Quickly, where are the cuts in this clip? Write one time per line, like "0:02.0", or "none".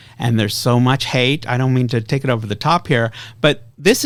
none

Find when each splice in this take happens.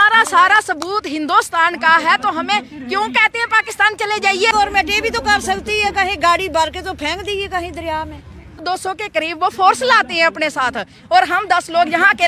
0:04.5
0:08.6

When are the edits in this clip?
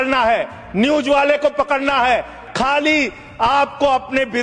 0:02.4

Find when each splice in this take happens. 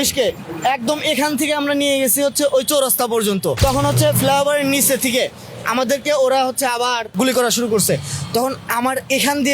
0:03.6
0:07.2

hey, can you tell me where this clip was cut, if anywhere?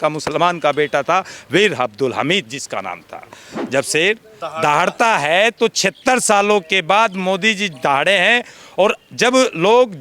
0:03.6

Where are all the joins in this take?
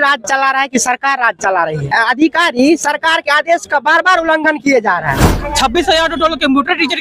0:01.9
0:05.3

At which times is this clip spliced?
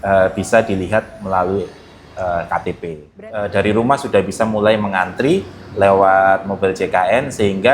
0:03.0

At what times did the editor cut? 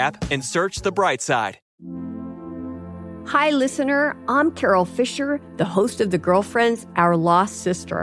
0:01.6

